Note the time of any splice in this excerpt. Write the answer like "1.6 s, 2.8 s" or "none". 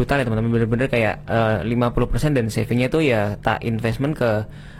none